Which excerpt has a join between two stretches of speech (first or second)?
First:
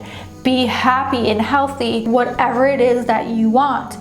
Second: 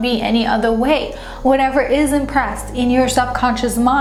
first